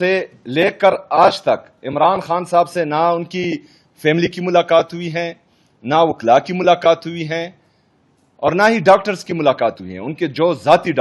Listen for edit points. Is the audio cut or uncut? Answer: uncut